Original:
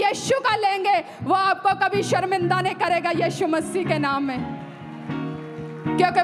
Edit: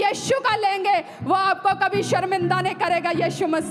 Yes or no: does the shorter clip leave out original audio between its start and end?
no